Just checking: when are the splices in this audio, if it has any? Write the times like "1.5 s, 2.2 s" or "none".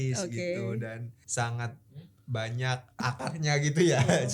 1.1 s, 3.0 s